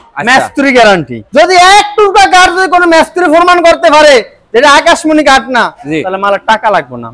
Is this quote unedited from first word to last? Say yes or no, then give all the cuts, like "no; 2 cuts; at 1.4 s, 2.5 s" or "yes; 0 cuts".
yes; 0 cuts